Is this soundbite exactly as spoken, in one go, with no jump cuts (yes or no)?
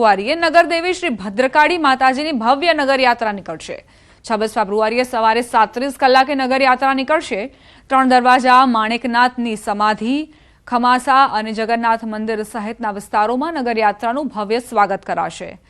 yes